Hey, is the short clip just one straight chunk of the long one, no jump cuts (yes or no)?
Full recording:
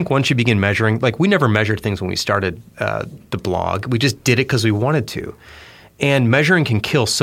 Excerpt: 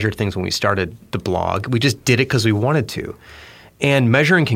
no